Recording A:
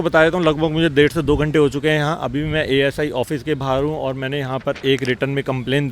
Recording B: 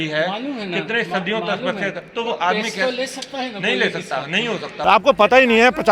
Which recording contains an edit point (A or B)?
B